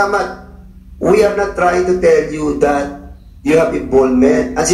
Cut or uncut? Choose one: uncut